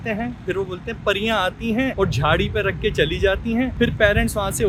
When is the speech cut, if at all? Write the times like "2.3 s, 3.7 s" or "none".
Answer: none